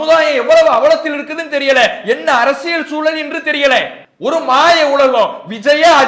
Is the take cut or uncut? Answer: cut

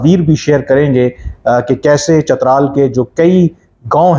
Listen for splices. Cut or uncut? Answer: uncut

